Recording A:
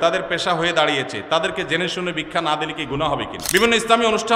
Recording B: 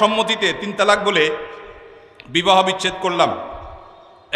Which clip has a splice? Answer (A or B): A